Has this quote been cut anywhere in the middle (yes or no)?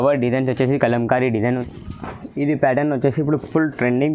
yes